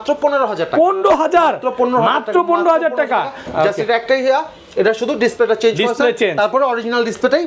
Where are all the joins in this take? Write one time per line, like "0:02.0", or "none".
none